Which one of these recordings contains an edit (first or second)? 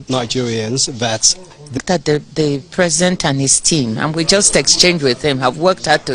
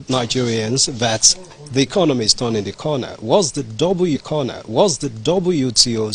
first